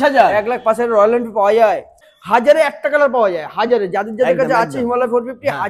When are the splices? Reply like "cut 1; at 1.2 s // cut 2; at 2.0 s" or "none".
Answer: cut 1; at 2.0 s